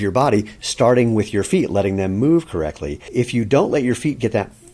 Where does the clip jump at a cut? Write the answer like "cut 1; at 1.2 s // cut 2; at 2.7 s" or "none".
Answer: cut 1; at 3.0 s